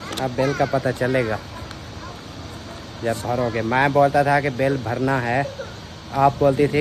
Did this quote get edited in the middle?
no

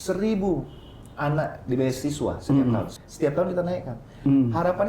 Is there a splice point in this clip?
yes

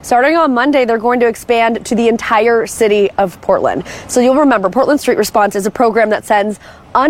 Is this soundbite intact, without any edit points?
no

